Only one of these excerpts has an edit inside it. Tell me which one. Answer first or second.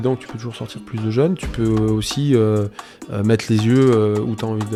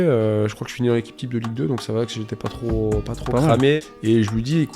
second